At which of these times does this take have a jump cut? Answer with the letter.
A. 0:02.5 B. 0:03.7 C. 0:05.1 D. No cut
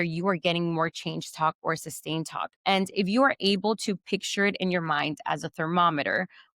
A